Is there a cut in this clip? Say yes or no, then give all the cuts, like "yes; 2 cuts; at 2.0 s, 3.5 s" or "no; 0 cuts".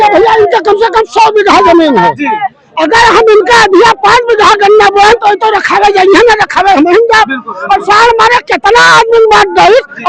no; 0 cuts